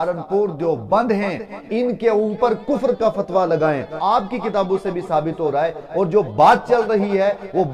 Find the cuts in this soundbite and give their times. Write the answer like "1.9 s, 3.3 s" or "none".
3.9 s